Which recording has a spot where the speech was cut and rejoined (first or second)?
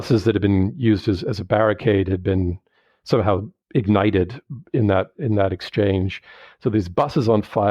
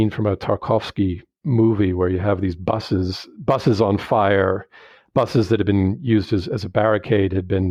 first